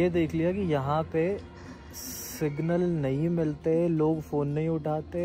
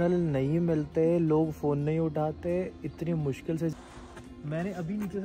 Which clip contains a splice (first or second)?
second